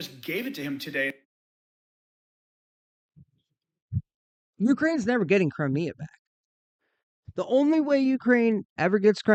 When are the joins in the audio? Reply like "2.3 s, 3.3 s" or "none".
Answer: none